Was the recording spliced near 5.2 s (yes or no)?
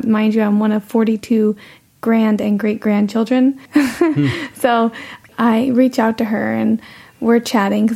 yes